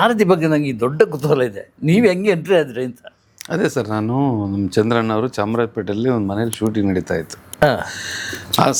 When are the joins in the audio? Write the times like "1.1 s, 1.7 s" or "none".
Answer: none